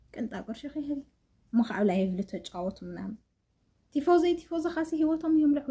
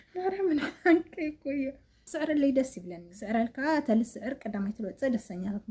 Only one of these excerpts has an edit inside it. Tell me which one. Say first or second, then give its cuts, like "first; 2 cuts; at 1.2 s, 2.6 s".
second; 1 cut; at 2.0 s